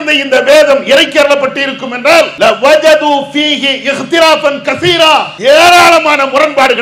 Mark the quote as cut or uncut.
cut